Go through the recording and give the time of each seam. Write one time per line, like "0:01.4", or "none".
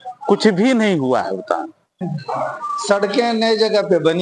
0:02.0